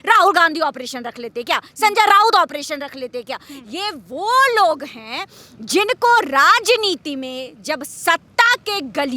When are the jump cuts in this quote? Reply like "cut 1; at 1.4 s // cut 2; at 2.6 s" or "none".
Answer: none